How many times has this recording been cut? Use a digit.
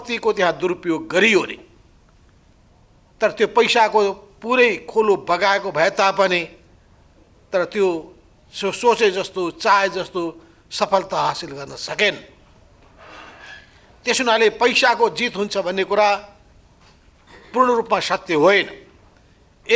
0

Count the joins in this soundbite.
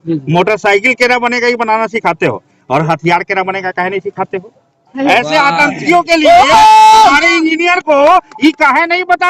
1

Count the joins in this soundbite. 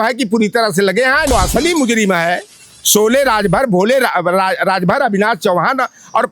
1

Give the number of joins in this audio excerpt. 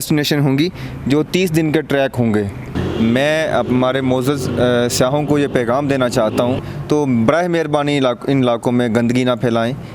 2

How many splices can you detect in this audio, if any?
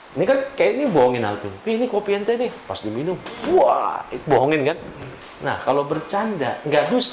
0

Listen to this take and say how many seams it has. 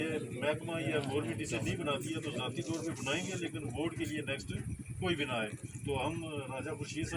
0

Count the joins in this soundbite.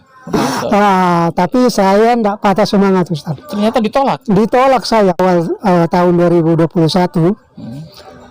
1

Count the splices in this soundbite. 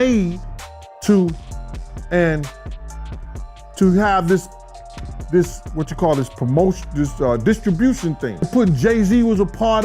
1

